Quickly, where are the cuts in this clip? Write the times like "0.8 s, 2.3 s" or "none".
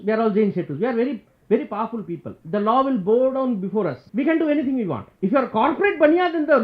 2.3 s, 4.0 s, 5.1 s